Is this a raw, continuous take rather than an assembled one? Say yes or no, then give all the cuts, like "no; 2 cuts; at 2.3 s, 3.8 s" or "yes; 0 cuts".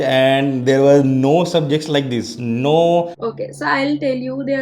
no; 1 cut; at 3.1 s